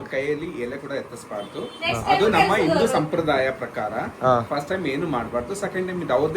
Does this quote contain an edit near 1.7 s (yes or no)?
no